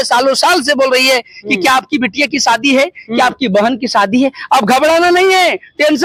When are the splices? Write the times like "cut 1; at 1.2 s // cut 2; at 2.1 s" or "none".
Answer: none